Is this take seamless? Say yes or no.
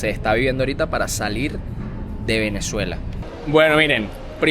no